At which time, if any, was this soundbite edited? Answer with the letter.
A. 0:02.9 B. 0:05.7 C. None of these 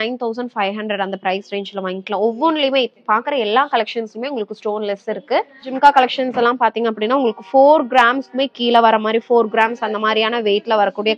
B